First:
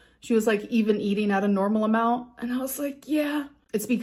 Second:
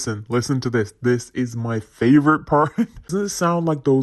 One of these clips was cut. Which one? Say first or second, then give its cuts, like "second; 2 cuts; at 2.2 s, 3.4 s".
second; 1 cut; at 3.0 s